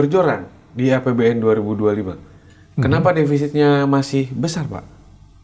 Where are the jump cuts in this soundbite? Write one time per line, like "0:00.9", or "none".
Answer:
none